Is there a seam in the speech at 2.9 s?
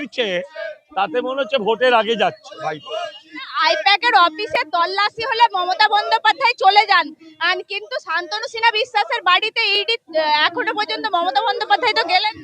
no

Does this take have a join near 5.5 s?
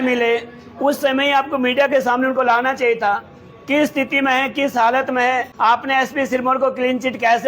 yes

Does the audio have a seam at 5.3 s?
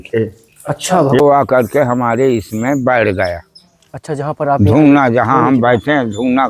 no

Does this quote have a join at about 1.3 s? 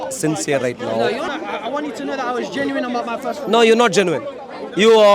yes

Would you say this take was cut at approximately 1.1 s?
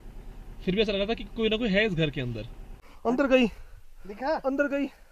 no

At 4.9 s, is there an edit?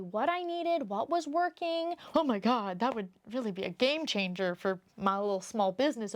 no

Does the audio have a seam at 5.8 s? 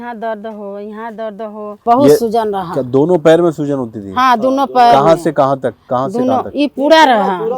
no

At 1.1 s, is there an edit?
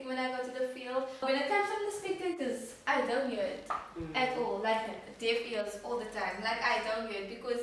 yes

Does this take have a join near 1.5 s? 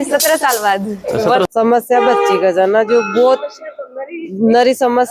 yes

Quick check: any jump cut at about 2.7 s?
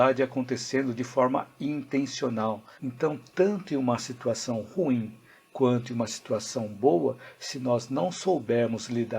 yes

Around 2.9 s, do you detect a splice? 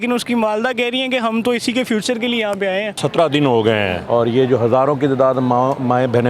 yes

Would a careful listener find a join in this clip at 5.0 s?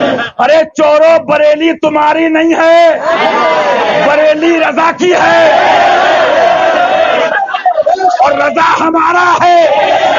no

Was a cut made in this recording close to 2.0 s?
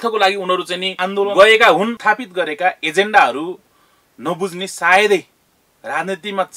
yes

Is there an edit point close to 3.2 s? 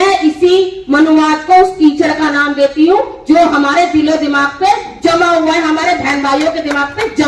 no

